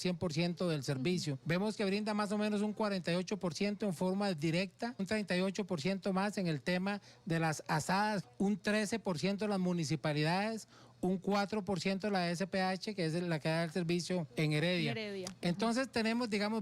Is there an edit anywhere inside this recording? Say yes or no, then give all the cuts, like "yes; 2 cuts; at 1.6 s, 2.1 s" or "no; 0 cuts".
yes; 4 cuts; at 1.4 s, 5.0 s, 8.2 s, 14.3 s